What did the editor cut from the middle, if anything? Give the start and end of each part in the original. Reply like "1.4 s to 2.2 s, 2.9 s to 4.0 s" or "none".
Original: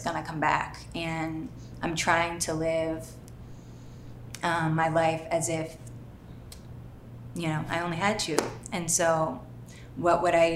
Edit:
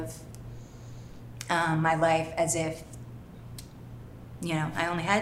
none